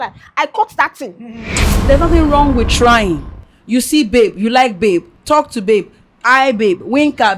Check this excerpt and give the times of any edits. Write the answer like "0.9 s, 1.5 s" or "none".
1.8 s